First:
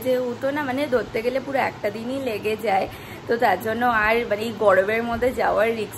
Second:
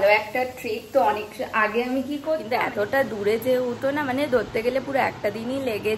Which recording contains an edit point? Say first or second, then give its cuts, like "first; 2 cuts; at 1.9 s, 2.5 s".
second; 1 cut; at 2.5 s